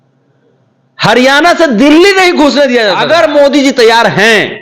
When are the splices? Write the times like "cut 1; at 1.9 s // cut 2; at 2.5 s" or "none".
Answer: cut 1; at 3.0 s